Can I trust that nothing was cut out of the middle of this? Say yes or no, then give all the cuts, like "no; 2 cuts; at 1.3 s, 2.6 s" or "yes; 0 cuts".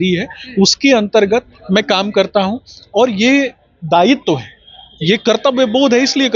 yes; 0 cuts